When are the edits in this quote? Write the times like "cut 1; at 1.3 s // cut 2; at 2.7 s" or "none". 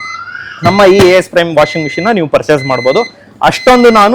none